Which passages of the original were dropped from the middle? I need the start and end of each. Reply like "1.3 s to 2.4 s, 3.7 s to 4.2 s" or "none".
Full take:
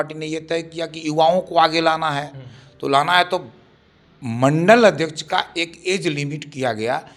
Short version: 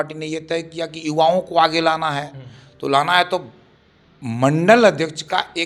none